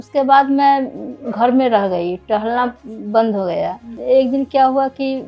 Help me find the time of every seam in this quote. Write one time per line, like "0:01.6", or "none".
0:03.9